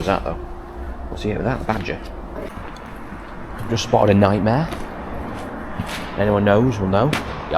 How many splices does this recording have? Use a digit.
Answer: 1